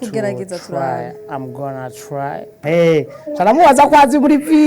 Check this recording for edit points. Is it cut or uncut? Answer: cut